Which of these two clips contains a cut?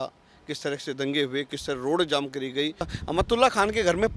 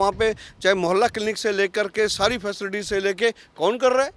first; 1 cut; at 2.9 s

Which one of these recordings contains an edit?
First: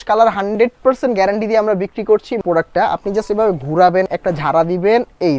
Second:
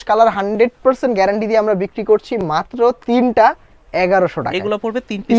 first; 2 cuts; at 2.4 s, 4.1 s

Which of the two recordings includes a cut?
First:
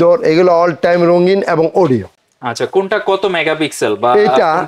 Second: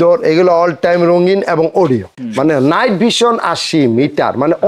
second; 1 cut; at 2.2 s

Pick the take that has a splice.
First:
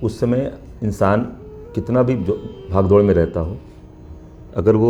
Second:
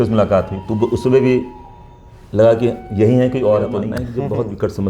second; 1 cut; at 4.0 s

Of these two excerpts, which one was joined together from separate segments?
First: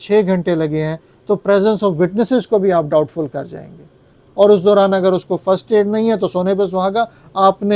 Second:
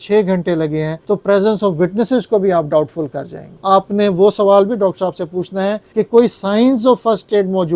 second; 3 cuts; at 0.9 s, 3.5 s, 5.8 s

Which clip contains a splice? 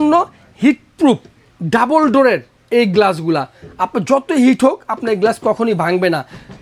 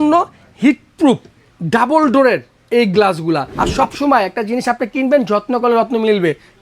second; 1 cut; at 3.6 s

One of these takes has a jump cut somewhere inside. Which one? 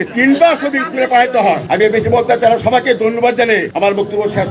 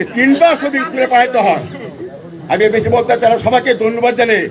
first; 2 cuts; at 1.6 s, 3.7 s

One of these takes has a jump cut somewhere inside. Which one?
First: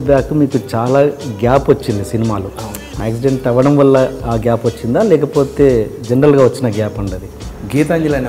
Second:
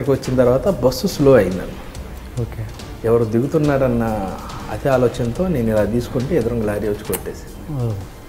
first; 2 cuts; at 2.9 s, 7.4 s

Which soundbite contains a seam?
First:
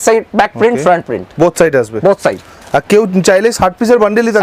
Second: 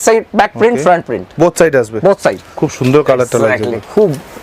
second; 1 cut; at 2.6 s

